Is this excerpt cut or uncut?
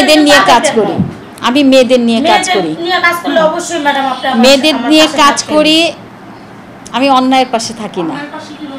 uncut